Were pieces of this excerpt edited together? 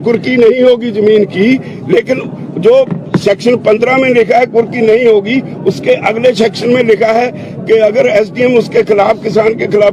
yes; 1 cut; at 6.2 s

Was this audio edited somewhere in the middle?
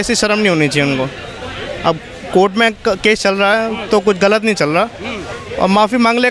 no; 0 cuts

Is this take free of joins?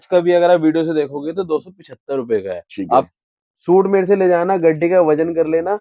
yes; 0 cuts

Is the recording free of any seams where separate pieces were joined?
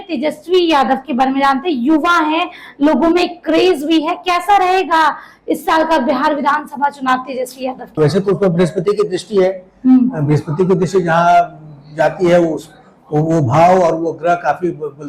no; 1 cut; at 7.8 s

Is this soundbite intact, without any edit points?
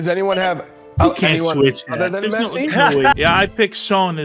no; 1 cut; at 3.2 s

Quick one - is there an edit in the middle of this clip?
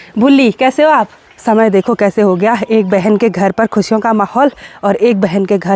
yes; 1 cut; at 1.2 s

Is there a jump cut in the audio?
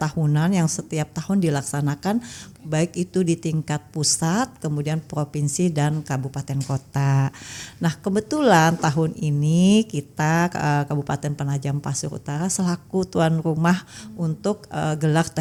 no; 0 cuts

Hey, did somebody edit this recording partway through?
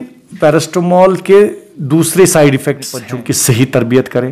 yes; 1 cut; at 3.1 s

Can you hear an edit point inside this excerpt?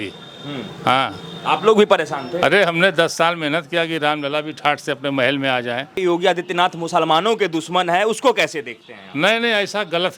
yes; 1 cut; at 6.0 s

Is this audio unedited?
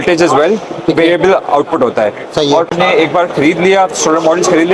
no; 1 cut; at 2.7 s

